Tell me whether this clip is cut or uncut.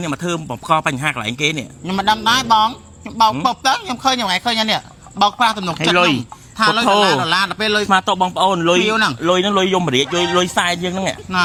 uncut